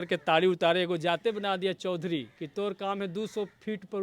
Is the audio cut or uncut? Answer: cut